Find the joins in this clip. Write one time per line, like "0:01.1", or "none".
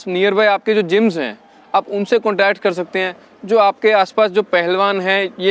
none